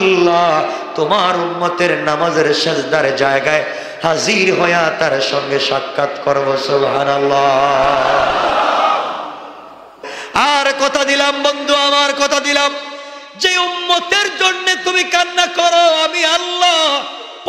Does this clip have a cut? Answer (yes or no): yes